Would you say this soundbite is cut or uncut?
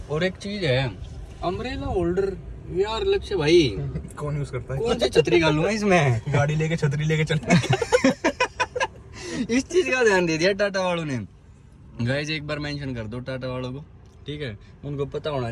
uncut